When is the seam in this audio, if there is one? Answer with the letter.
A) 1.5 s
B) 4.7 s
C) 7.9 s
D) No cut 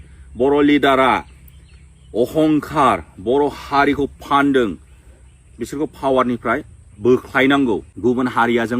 C